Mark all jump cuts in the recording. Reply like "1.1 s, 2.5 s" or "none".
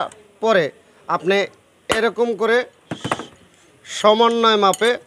none

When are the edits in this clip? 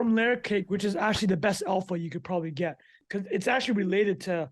2.9 s

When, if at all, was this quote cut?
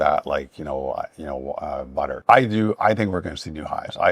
2.2 s

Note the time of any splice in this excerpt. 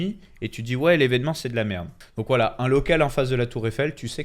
1.9 s

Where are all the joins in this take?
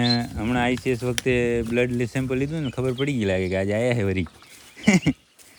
none

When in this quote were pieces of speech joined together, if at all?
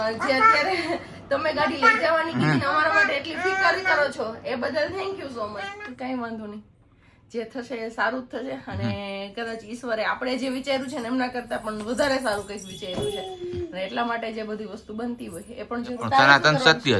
5.7 s, 16.0 s

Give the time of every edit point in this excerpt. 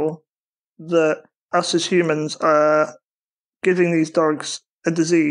1.3 s

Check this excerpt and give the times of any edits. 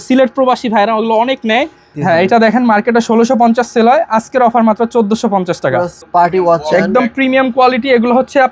1.8 s, 6.0 s

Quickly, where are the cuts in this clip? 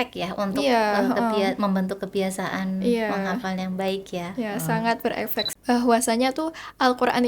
5.5 s

